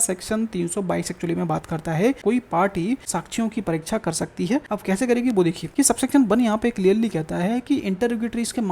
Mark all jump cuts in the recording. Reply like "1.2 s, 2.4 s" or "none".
2.2 s, 3.0 s, 4.7 s, 5.6 s